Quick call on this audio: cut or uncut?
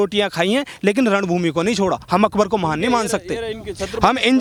uncut